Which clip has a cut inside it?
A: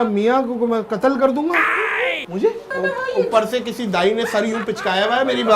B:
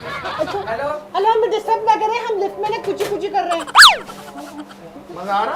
A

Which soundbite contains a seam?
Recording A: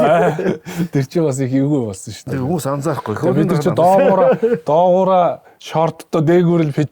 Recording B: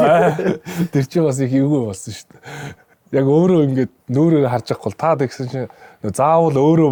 A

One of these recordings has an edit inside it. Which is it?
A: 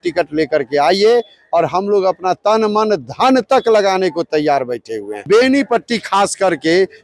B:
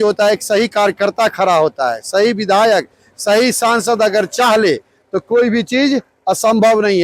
A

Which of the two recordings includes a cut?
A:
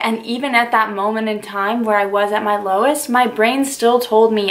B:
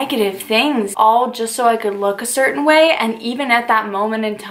B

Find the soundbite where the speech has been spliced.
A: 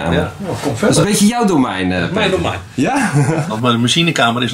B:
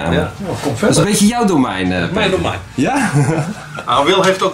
A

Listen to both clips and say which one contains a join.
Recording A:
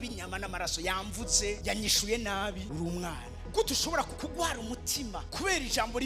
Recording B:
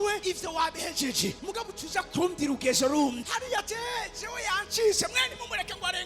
B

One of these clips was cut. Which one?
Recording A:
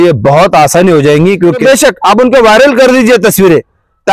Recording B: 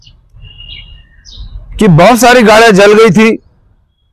A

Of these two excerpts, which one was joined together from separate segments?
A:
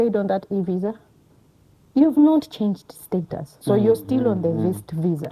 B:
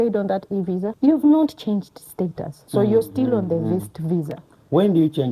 B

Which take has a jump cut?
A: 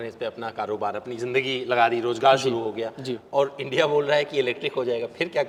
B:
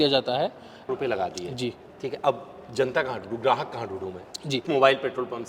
B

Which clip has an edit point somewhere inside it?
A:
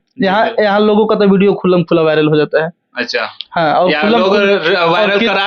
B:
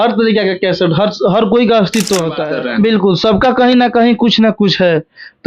B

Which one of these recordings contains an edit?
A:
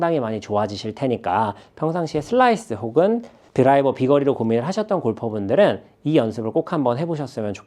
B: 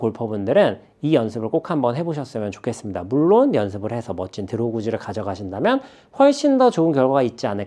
A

